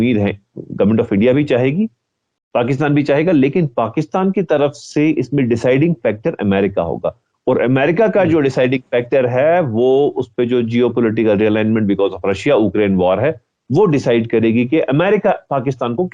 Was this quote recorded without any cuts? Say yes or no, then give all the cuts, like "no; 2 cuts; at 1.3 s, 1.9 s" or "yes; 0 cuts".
yes; 0 cuts